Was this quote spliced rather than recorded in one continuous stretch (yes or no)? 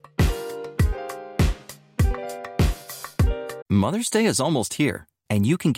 no